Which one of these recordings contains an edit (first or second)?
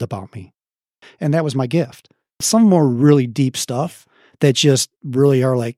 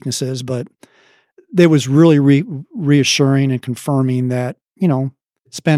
first